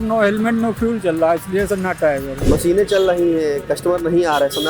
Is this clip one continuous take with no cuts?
no; 1 cut; at 2.3 s

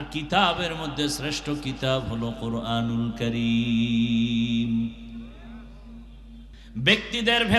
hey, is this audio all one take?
no; 1 cut; at 6.6 s

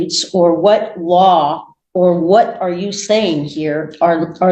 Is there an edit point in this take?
no; 0 cuts

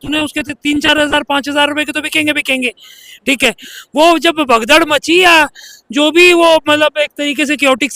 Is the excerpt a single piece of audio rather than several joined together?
yes; 0 cuts

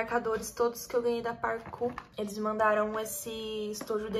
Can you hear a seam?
yes; 1 cut; at 2.0 s

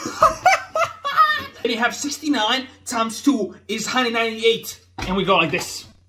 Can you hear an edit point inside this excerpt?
yes; 1 cut; at 1.5 s

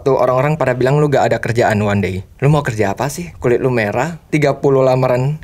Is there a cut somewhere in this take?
yes; 3 cuts; at 2.3 s, 3.2 s, 4.2 s

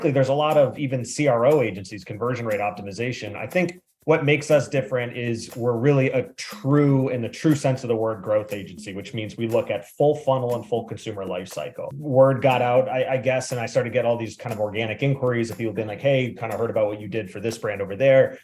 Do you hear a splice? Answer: yes; 1 cut; at 11.9 s

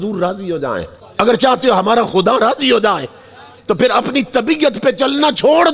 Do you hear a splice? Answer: yes; 1 cut; at 1.0 s

